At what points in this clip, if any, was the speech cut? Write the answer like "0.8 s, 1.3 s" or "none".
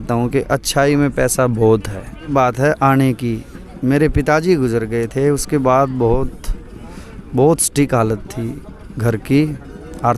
2.3 s